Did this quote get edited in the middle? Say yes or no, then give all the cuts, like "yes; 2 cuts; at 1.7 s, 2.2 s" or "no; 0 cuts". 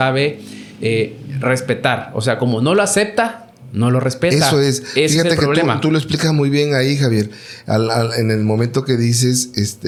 no; 0 cuts